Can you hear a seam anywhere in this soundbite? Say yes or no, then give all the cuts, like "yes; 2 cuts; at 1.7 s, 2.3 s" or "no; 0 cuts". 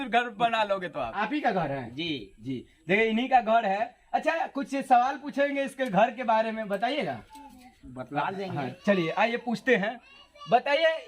yes; 1 cut; at 1.1 s